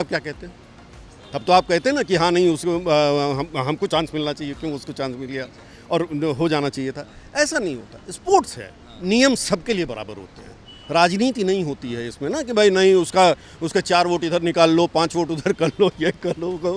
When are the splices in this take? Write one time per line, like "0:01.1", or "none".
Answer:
none